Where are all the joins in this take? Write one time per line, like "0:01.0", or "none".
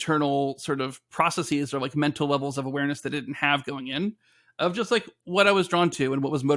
none

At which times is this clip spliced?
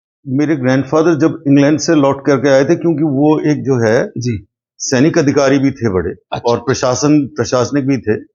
none

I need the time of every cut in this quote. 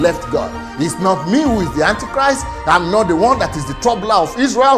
none

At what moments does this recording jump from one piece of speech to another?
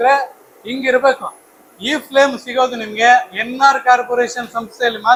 none

